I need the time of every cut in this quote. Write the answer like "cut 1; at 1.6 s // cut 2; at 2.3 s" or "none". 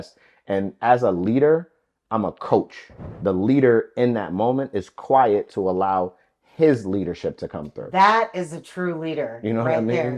cut 1; at 3.0 s